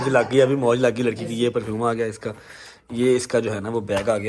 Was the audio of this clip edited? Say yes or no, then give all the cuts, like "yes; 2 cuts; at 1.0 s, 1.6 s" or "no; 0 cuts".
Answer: no; 0 cuts